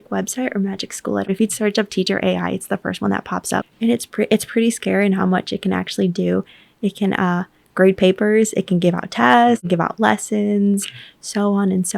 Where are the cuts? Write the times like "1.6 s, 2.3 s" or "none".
1.3 s, 3.6 s, 9.6 s